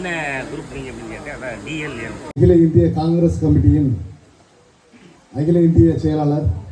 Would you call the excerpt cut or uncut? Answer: cut